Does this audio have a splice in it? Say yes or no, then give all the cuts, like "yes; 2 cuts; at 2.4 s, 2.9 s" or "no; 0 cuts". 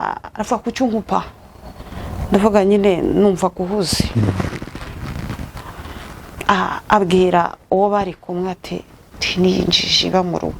no; 0 cuts